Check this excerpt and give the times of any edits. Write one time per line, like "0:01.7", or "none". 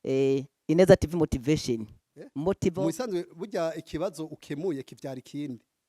0:02.7